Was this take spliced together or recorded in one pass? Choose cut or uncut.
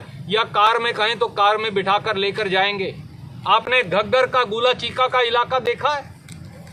uncut